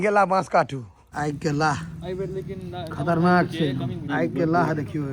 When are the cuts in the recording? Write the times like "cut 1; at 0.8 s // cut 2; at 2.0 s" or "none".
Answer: cut 1; at 1.0 s // cut 2; at 4.0 s